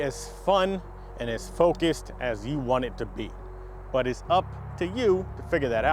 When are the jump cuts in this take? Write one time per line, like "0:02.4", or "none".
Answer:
none